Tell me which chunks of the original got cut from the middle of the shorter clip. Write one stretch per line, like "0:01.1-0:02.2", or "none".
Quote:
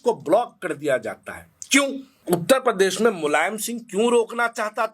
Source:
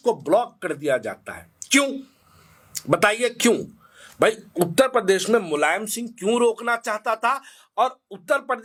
0:02.2-0:04.5